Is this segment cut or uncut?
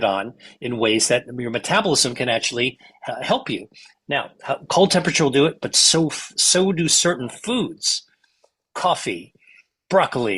uncut